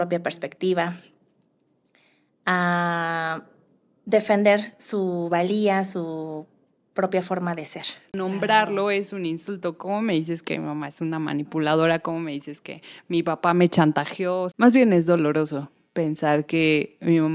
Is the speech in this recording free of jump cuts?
no; 2 cuts; at 8.1 s, 14.5 s

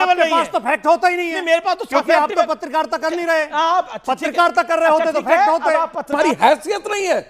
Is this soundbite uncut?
no; 1 cut; at 6.0 s

